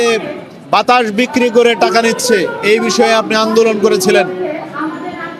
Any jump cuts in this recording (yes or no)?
no